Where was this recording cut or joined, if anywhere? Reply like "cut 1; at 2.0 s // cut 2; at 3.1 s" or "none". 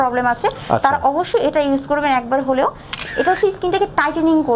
cut 1; at 3.0 s